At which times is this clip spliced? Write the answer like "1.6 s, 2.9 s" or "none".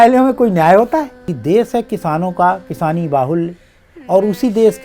1.2 s